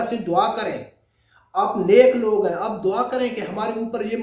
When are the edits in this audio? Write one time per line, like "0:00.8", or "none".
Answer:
none